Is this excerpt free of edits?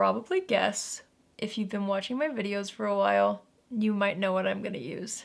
yes; 0 cuts

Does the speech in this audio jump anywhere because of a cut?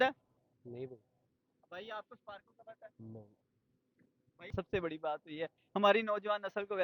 yes; 1 cut; at 4.5 s

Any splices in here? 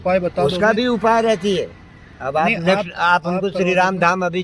no; 0 cuts

